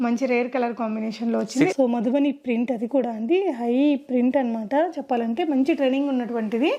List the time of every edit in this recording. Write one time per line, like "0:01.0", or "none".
0:01.7